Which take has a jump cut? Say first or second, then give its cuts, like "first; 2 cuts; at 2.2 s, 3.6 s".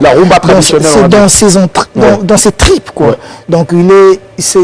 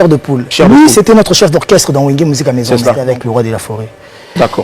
second; 1 cut; at 3.0 s